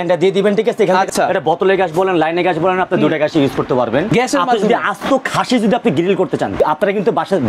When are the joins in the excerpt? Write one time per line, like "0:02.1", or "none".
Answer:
0:01.1
0:04.1
0:06.6